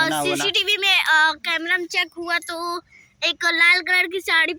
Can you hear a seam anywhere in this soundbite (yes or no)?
no